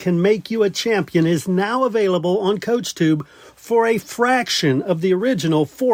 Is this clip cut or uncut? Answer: uncut